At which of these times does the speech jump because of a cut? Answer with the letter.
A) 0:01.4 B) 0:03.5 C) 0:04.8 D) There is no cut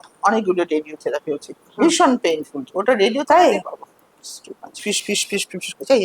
C